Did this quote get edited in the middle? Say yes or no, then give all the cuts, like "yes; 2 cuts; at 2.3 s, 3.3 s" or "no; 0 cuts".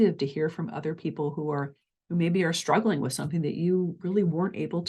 no; 0 cuts